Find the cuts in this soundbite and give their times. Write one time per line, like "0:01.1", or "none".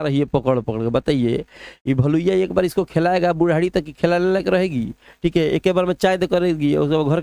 none